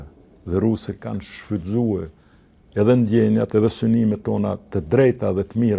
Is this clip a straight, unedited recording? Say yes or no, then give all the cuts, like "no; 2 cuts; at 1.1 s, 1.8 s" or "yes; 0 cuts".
no; 1 cut; at 1.0 s